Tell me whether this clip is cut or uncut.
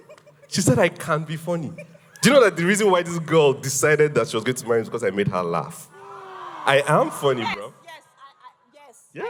uncut